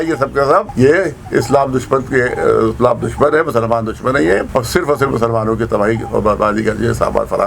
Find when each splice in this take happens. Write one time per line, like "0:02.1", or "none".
none